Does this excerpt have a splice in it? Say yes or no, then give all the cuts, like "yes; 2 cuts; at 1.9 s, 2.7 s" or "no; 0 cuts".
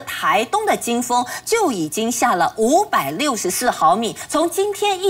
yes; 1 cut; at 4.2 s